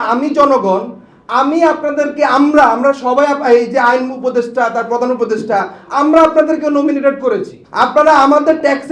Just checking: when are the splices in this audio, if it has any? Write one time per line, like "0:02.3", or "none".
0:07.6